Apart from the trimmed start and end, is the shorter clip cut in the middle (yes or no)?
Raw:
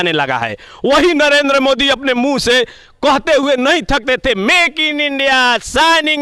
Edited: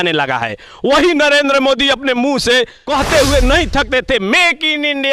yes